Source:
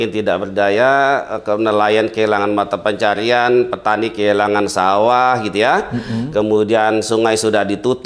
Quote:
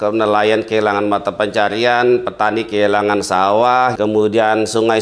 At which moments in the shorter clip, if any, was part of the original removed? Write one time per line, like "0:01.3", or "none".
0:04.0